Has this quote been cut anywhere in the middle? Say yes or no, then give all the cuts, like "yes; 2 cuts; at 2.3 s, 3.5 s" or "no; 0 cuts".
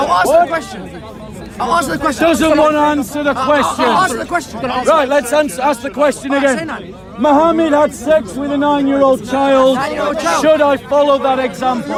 no; 0 cuts